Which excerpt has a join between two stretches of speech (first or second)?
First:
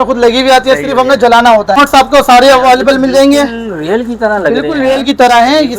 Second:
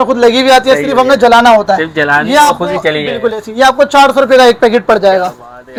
first